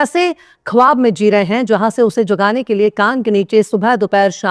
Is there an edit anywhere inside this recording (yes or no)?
no